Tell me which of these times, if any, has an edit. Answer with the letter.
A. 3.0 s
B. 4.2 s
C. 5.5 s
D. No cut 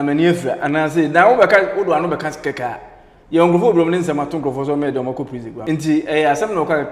C